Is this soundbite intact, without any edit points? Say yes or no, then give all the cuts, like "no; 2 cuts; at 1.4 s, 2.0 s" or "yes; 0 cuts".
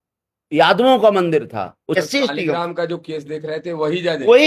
no; 1 cut; at 2.0 s